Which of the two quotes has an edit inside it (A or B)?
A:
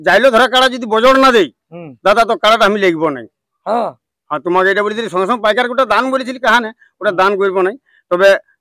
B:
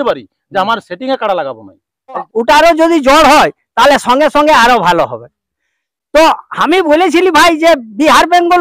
B